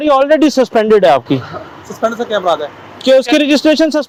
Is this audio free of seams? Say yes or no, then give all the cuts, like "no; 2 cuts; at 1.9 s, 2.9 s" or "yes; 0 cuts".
yes; 0 cuts